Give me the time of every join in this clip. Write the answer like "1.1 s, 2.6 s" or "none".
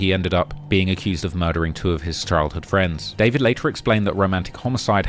3.6 s